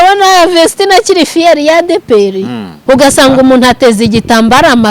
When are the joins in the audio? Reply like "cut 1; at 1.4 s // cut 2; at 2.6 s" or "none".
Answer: cut 1; at 2.7 s